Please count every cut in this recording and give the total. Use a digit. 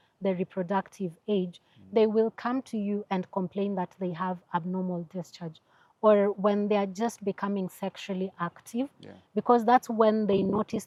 0